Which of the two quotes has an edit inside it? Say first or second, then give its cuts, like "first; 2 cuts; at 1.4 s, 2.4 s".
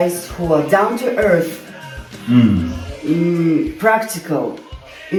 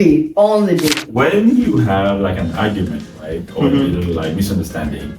second; 1 cut; at 1.0 s